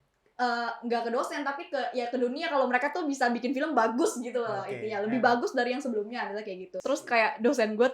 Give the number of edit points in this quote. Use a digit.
1